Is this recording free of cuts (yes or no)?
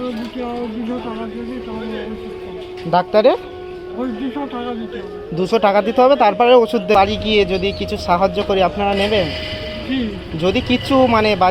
no